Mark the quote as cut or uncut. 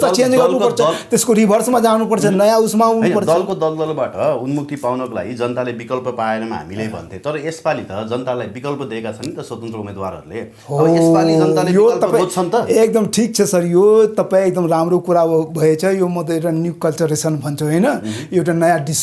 uncut